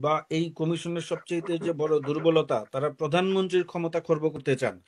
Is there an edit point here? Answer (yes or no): no